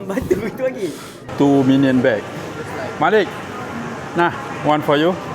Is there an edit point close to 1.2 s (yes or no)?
yes